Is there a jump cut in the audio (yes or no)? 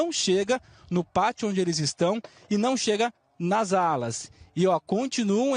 no